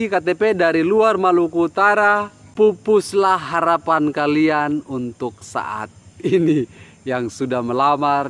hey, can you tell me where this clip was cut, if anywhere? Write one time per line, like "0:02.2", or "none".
0:02.4